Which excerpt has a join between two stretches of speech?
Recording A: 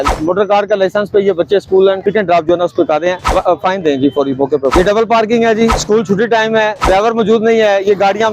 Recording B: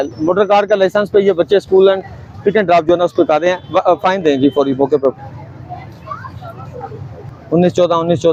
A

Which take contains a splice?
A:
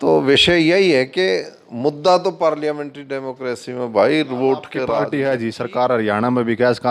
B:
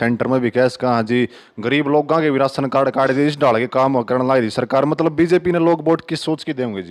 A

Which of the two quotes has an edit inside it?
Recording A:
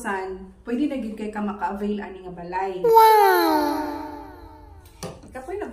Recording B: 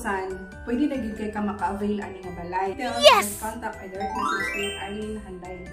A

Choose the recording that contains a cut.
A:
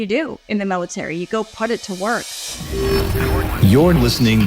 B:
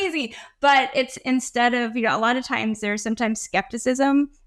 A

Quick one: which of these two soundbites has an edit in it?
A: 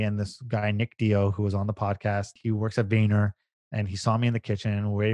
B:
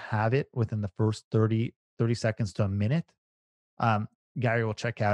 A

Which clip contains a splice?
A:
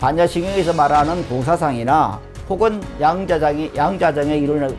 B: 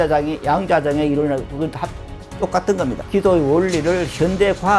B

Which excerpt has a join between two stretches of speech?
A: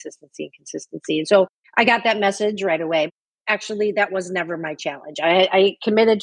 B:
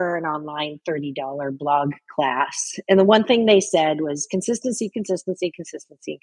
A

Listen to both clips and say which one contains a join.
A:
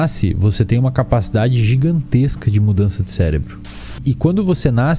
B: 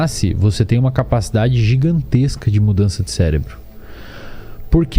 A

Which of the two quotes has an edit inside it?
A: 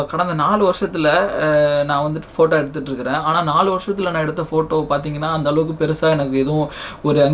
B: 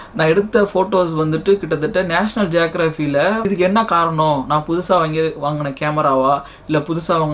B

